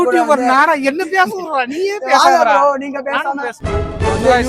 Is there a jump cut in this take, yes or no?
no